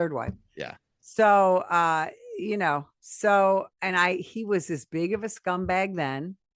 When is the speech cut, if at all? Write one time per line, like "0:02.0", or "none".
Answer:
none